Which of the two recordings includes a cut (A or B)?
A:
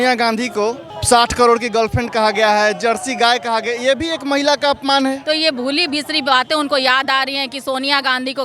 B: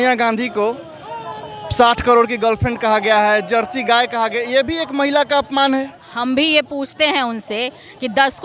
A